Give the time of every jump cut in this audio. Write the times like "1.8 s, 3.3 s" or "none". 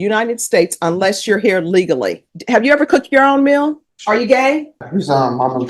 2.3 s, 3.9 s, 4.8 s